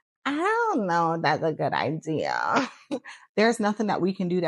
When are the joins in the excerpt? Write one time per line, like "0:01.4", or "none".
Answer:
0:03.0

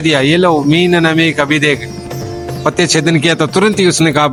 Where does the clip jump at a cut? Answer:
none

